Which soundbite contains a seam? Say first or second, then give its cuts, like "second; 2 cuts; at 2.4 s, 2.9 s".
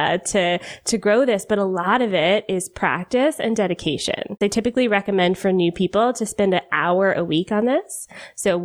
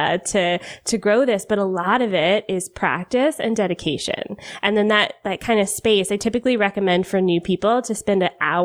first; 1 cut; at 4.4 s